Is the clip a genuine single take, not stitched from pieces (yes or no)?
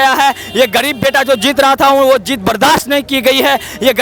yes